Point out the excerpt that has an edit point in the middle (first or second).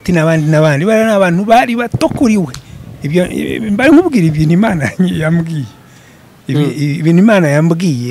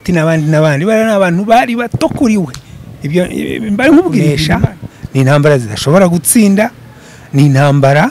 second